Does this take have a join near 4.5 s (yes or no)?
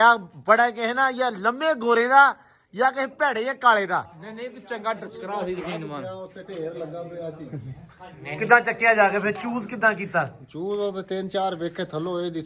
no